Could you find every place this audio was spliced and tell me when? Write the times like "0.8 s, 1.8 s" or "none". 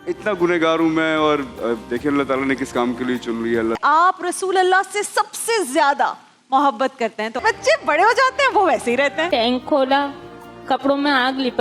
3.8 s, 7.4 s, 9.3 s

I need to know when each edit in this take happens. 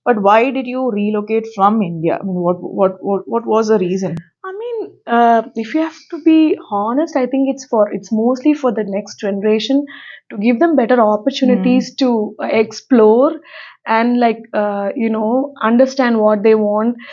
none

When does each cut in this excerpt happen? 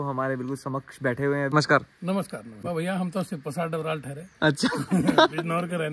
1.5 s, 2.6 s

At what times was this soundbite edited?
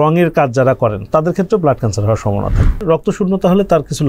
2.8 s

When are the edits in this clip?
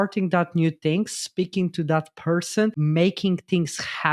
2.8 s

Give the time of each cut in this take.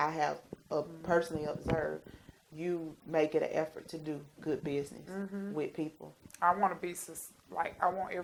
none

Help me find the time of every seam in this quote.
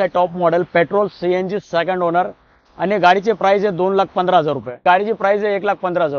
4.8 s

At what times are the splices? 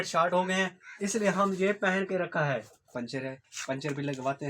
2.9 s

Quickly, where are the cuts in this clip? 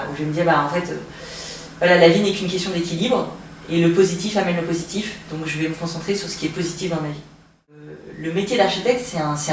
8.0 s

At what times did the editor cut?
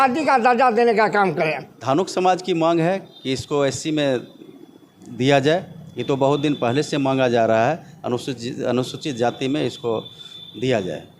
1.6 s

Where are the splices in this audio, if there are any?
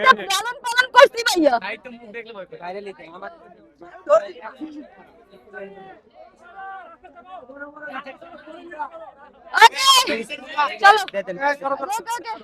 none

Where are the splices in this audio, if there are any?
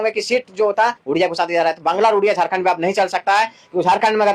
1.0 s

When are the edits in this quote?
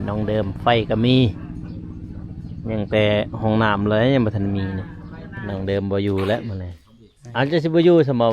5.4 s

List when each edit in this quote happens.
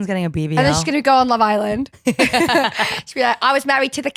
1.9 s

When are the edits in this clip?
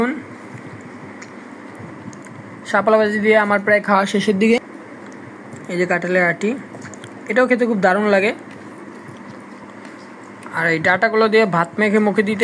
1.9 s, 4.6 s, 8.7 s

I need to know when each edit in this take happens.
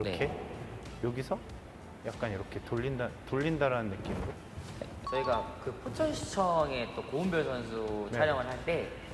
none

